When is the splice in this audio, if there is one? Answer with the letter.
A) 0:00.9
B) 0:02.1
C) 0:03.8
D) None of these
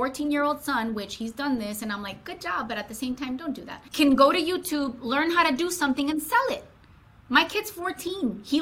C